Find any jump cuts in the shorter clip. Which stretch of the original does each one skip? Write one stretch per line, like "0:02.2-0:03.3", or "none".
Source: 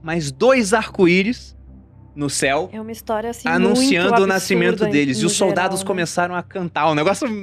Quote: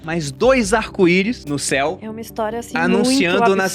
0:01.4-0:02.1